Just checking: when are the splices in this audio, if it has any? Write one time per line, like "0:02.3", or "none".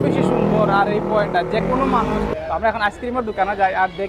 0:02.3